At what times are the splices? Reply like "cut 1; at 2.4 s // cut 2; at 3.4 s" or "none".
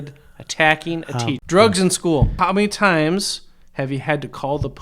cut 1; at 1.4 s // cut 2; at 2.3 s